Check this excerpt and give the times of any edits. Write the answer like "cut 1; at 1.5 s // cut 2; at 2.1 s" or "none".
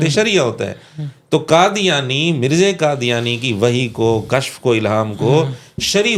none